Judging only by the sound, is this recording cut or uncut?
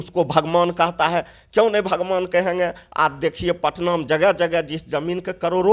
uncut